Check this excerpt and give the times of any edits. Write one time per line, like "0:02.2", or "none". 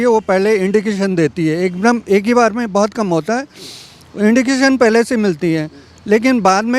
none